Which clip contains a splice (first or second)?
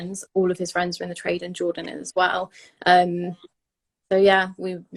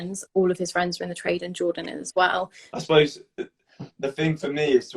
second